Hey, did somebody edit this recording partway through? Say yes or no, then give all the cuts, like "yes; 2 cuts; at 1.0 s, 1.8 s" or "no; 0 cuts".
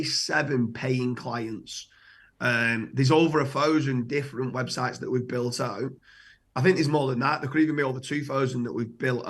no; 0 cuts